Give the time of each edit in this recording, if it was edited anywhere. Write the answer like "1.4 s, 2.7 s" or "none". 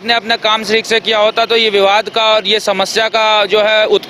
none